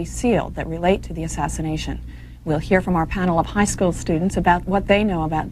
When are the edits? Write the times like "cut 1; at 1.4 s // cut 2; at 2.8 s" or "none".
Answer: cut 1; at 1.5 s